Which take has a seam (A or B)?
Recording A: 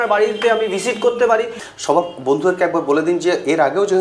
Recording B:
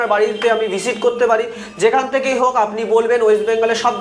A